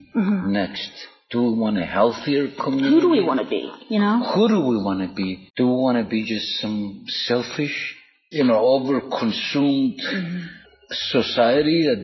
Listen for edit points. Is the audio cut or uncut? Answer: cut